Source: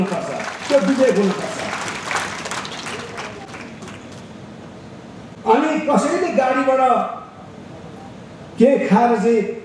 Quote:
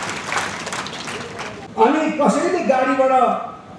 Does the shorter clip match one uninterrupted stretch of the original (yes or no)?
no